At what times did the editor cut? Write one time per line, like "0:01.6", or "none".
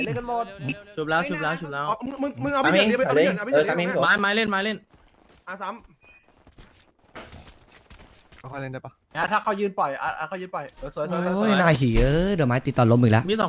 none